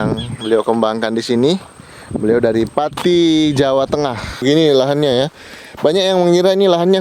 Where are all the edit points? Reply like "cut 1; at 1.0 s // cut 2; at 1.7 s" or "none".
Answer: cut 1; at 4.4 s